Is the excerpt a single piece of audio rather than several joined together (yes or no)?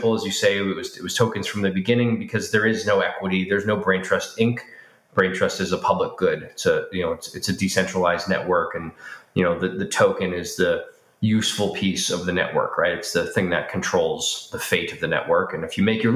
yes